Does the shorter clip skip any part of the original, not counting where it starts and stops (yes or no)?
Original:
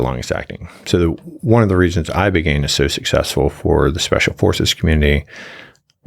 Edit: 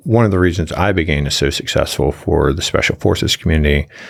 no